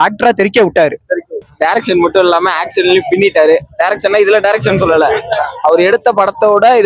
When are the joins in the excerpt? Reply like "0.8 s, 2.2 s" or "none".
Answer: 1.5 s